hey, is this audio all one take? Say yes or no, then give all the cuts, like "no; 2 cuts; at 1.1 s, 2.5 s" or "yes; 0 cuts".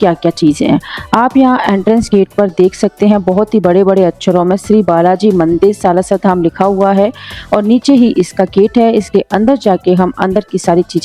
yes; 0 cuts